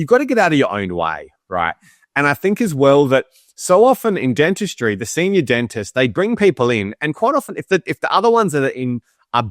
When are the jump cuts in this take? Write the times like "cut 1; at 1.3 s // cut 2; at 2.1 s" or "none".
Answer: none